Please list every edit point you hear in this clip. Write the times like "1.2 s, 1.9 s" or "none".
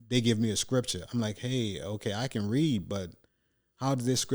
none

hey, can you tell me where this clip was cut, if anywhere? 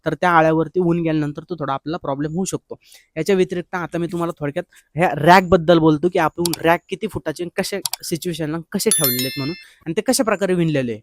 none

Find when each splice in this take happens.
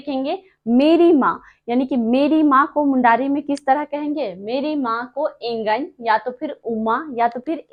none

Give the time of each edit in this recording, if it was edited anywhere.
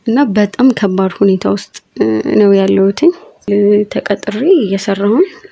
3.5 s

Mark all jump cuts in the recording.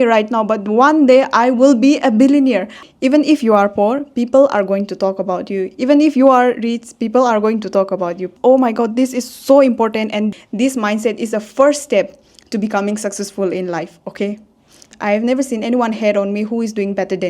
2.7 s, 8.3 s, 10.4 s, 14.9 s

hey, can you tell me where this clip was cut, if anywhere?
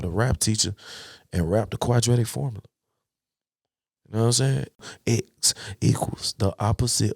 4.8 s

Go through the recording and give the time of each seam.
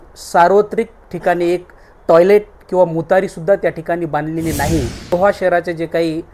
5.1 s

